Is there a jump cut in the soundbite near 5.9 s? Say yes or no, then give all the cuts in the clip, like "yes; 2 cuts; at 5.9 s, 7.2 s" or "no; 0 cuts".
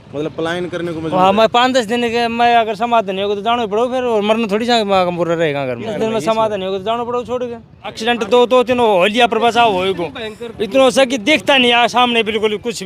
yes; 2 cuts; at 5.9 s, 8.0 s